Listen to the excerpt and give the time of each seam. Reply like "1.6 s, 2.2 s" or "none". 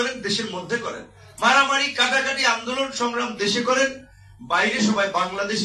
none